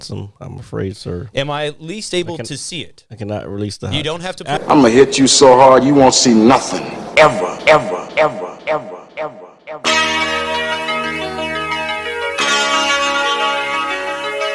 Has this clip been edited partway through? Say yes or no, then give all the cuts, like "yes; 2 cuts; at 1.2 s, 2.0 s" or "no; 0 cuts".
yes; 1 cut; at 4.6 s